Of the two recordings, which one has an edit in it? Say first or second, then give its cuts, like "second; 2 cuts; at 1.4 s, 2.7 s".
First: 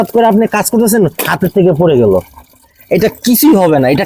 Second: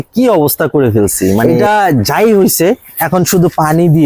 second; 1 cut; at 1.5 s